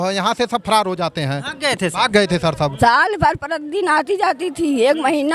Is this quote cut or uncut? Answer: cut